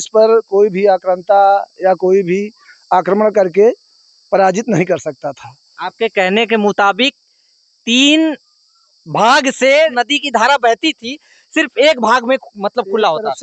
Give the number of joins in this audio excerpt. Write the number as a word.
one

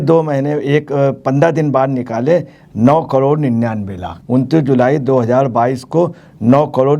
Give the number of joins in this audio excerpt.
one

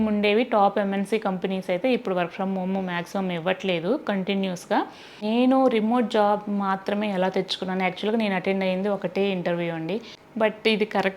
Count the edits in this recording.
two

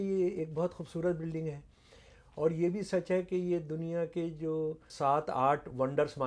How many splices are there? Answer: one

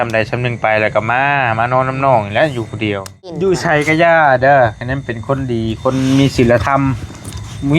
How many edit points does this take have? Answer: one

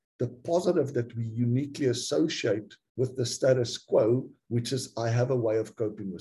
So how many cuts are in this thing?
two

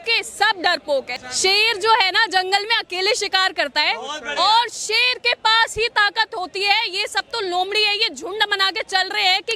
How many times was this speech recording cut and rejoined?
one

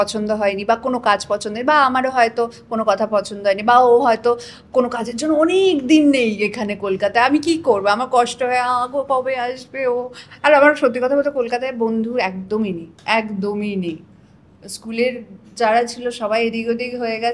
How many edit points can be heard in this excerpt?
zero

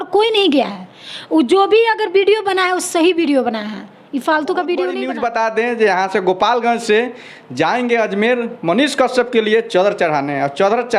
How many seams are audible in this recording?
one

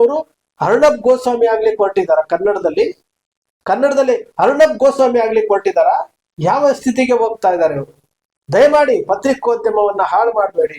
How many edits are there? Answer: zero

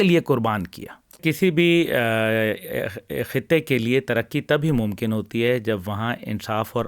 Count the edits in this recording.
one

